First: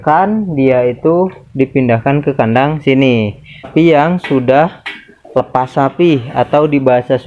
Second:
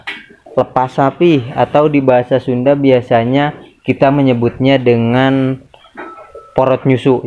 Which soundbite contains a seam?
first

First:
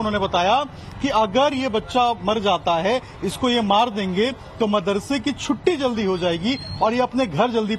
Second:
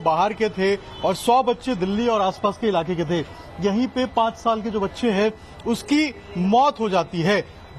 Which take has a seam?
second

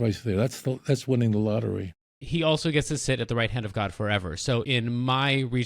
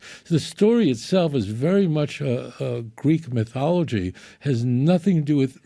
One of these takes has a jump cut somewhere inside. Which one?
first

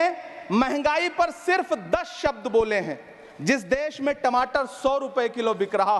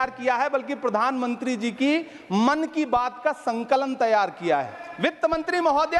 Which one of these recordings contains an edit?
second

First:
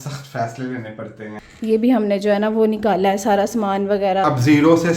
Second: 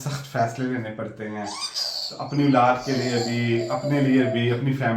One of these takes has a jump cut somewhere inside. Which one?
first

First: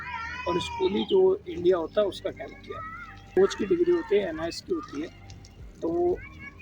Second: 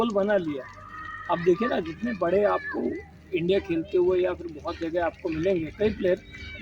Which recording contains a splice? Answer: first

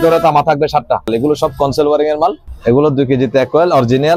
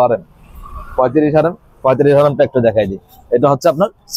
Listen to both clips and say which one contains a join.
first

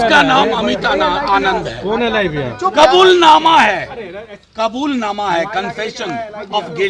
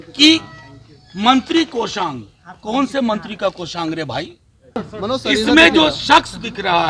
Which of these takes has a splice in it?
second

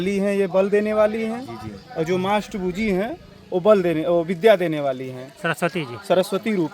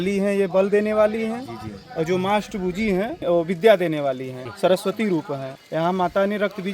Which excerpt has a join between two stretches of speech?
second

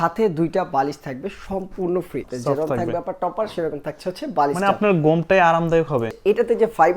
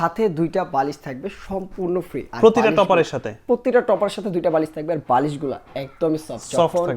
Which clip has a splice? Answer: first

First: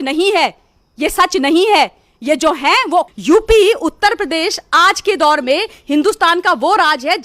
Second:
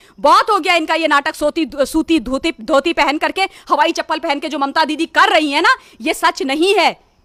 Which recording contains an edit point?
first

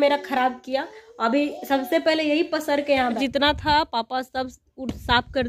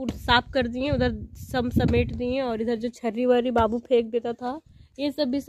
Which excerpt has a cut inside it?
first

